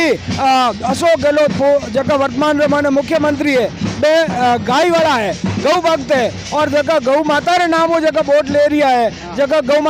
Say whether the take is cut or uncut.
uncut